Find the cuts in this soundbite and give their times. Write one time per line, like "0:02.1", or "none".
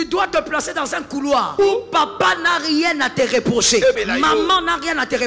0:01.5
0:04.0

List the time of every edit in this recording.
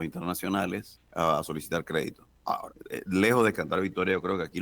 0:01.0
0:02.3

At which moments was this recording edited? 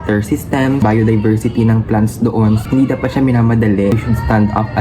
0:00.8
0:02.6
0:04.0

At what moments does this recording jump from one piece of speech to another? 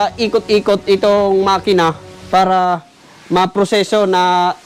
none

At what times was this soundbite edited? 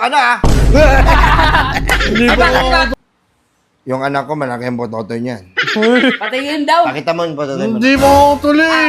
0:02.9

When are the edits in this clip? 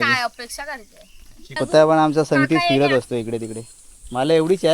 0:01.6

